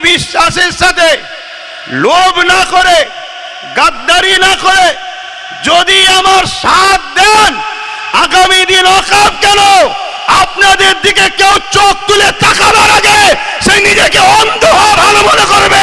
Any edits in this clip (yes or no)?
no